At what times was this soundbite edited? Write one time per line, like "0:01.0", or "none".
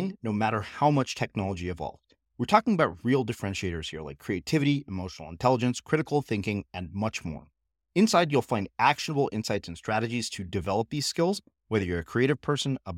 none